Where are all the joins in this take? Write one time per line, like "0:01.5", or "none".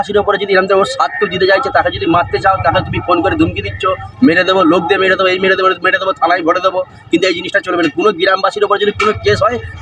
none